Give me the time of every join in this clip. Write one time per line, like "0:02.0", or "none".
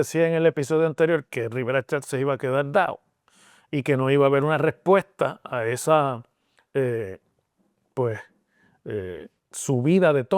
none